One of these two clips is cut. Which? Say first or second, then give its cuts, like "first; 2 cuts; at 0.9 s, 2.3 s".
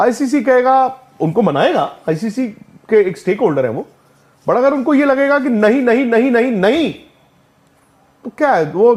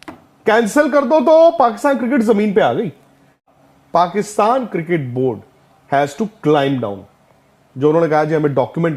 second; 1 cut; at 3.5 s